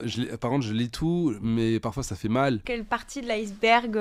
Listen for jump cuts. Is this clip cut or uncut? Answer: cut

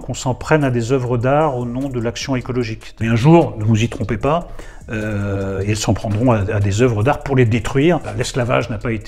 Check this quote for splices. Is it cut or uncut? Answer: cut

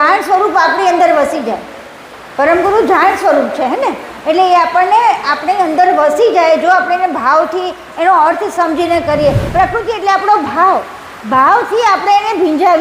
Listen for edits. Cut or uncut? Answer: cut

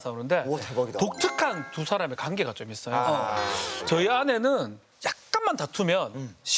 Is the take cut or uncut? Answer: uncut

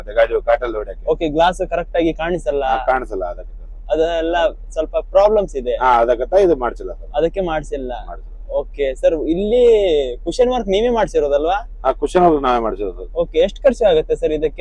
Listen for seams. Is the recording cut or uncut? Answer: uncut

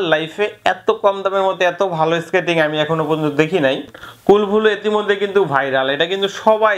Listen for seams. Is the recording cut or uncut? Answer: cut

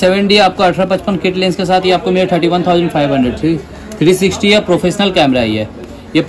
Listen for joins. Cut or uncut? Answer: uncut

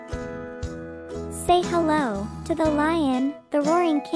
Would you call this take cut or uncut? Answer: cut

